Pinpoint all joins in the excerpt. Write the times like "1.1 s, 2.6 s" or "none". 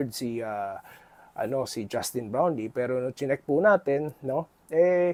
none